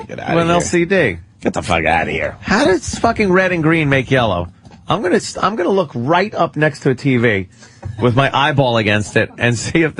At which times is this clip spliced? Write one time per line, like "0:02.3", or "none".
0:01.5